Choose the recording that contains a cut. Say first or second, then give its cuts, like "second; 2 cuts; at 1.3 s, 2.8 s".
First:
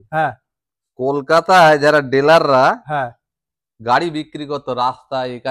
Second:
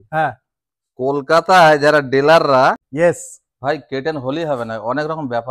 second; 1 cut; at 2.8 s